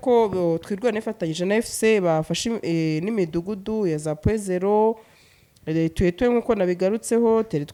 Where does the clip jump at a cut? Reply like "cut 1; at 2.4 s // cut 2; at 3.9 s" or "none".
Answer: none

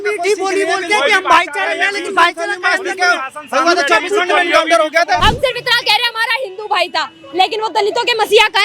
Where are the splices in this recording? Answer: cut 1; at 5.2 s

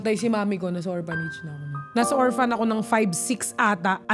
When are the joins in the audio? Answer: cut 1; at 1.9 s

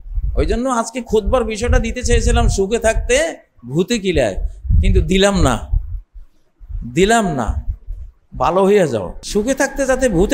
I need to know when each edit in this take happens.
cut 1; at 9.2 s

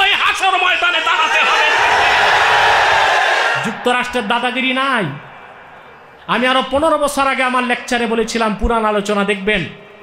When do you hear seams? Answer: cut 1; at 3.6 s

